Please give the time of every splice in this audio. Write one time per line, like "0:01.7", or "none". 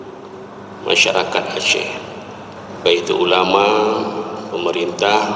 0:02.6